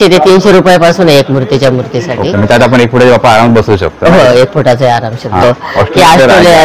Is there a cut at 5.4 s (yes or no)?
yes